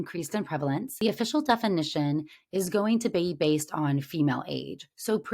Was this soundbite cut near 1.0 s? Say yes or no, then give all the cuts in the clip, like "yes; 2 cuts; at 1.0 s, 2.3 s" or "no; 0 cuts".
yes; 1 cut; at 1.0 s